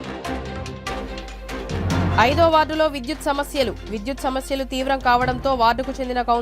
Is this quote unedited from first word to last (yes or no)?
no